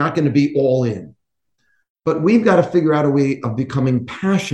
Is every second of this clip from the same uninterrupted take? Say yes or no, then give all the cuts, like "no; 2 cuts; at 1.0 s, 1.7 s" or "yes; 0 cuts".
yes; 0 cuts